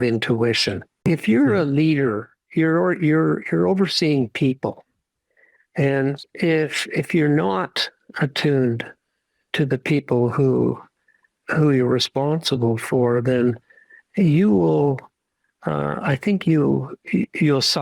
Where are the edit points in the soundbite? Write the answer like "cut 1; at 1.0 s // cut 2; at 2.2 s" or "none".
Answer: cut 1; at 1.0 s